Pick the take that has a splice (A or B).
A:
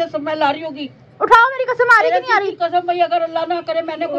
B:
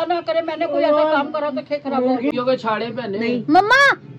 B